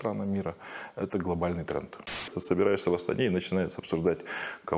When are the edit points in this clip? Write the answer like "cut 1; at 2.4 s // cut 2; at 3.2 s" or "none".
cut 1; at 2.3 s